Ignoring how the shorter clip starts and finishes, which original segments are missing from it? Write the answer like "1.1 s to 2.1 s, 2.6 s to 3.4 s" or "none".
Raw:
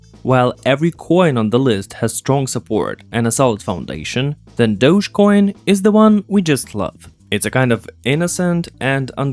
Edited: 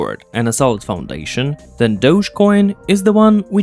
none